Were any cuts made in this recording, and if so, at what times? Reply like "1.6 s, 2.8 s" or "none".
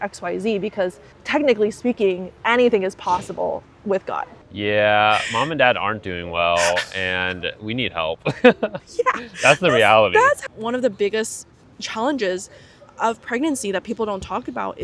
2.3 s, 4.3 s, 10.4 s

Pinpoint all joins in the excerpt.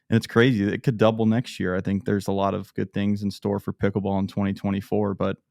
none

